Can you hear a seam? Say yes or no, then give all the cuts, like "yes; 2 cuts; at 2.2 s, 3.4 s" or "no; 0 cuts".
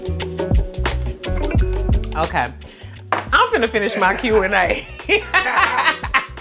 no; 0 cuts